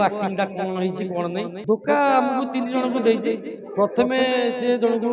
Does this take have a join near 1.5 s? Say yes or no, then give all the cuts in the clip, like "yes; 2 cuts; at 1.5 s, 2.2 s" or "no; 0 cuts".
yes; 1 cut; at 1.5 s